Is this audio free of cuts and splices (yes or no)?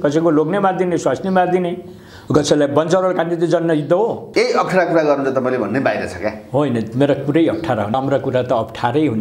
no